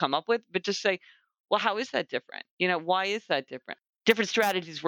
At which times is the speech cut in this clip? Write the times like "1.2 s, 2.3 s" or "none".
2.4 s, 3.6 s